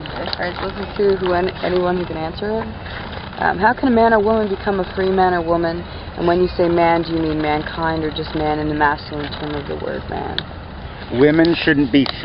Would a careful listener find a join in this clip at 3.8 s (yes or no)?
yes